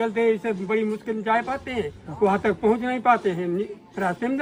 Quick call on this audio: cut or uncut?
uncut